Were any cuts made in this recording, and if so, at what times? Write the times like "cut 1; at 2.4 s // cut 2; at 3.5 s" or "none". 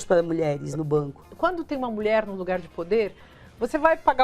cut 1; at 1.3 s